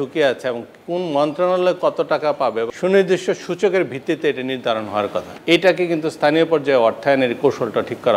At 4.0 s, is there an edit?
no; 2 cuts; at 2.7 s, 5.3 s

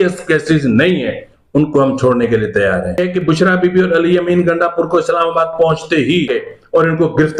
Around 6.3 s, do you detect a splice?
yes; 2 cuts; at 3.0 s, 6.3 s

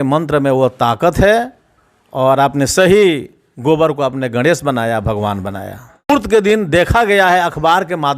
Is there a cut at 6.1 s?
yes; 1 cut; at 6.1 s

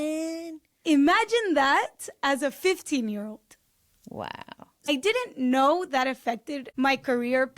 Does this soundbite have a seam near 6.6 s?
yes; 2 cuts; at 4.9 s, 6.6 s

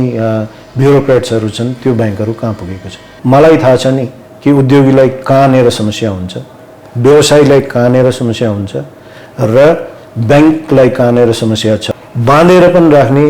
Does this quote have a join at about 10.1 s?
no; 2 cuts; at 3.1 s, 11.9 s

